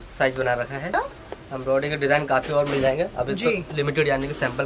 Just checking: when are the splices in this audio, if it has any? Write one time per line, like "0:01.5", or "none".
0:00.9

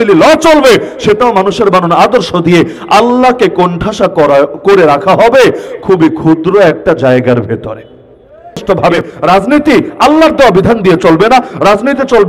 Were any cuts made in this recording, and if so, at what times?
0:08.6

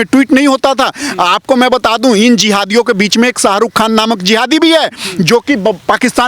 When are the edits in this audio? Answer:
none

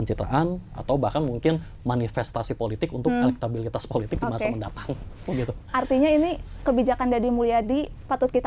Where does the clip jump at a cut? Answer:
none

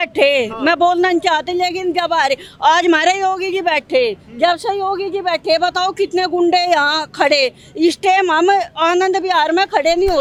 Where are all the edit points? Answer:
none

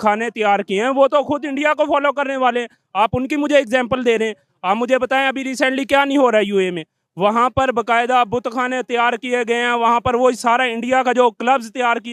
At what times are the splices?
none

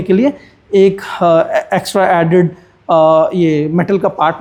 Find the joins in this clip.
none

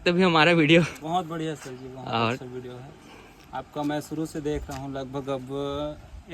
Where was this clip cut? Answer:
none

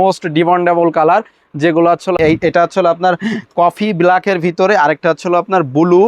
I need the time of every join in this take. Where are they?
0:02.2

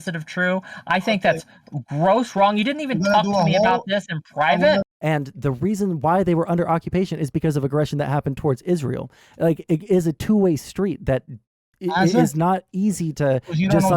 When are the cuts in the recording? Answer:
0:04.9

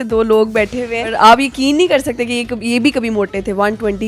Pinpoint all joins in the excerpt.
0:01.1

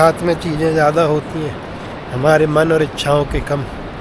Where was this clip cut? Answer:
none

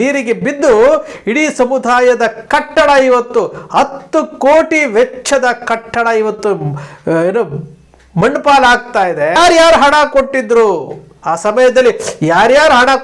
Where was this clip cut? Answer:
0:09.4

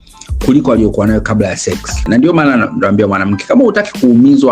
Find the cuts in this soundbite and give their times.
0:02.0

